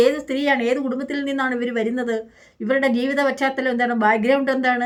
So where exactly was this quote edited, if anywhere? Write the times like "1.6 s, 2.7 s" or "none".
none